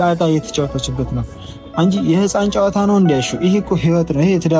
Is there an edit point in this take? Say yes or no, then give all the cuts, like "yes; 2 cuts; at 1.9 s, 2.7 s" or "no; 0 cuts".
no; 0 cuts